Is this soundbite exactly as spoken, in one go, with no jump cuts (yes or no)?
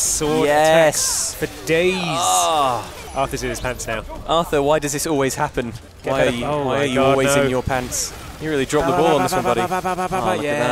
no